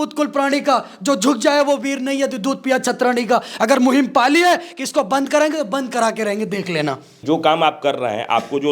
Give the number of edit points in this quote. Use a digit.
1